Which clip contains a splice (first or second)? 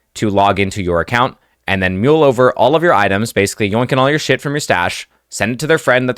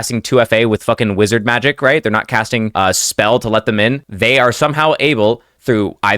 second